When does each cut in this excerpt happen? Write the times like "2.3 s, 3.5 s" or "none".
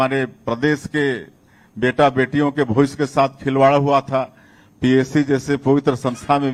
none